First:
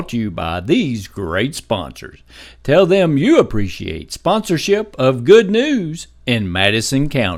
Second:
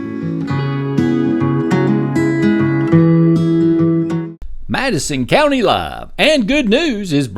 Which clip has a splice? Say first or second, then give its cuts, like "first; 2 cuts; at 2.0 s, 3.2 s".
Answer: second; 1 cut; at 4.3 s